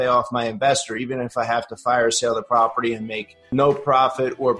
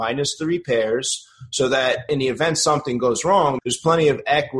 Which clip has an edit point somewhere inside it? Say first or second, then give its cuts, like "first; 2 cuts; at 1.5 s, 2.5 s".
second; 1 cut; at 3.6 s